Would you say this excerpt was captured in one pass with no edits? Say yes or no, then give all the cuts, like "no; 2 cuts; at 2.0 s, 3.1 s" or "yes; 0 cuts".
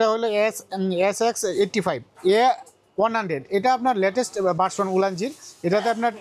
no; 1 cut; at 2.1 s